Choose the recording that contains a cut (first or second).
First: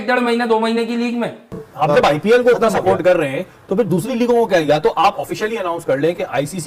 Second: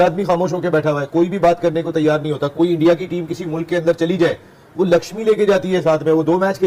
first